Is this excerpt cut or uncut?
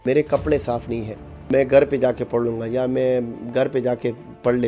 cut